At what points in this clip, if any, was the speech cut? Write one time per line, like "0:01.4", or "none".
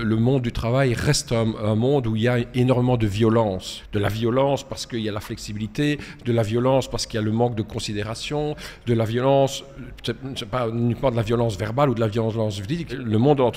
none